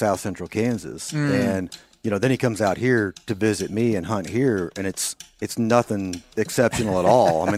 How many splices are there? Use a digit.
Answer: 0